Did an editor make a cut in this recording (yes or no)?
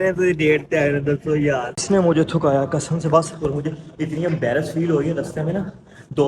yes